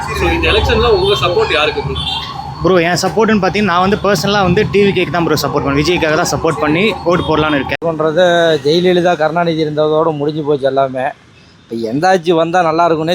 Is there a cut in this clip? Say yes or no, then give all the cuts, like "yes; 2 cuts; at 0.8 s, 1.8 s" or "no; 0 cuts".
yes; 1 cut; at 7.8 s